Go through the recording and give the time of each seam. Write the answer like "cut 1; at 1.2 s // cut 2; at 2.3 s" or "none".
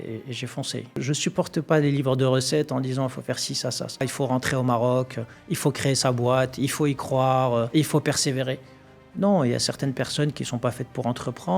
cut 1; at 1.0 s // cut 2; at 4.0 s // cut 3; at 7.7 s